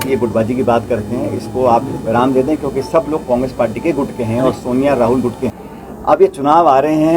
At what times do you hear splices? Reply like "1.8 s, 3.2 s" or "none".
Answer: 5.6 s